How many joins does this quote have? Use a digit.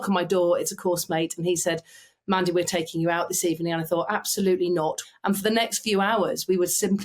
1